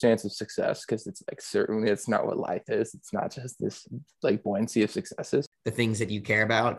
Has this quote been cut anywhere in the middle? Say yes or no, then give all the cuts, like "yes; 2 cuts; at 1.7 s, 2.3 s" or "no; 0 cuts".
yes; 1 cut; at 5.5 s